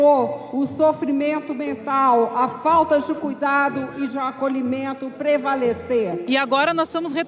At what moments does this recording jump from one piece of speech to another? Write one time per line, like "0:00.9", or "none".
0:06.2